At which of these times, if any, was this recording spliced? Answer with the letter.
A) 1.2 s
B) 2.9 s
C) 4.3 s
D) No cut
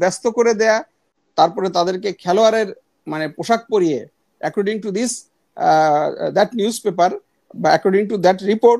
A